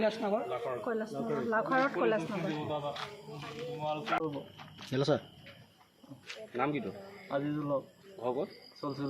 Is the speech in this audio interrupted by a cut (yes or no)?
yes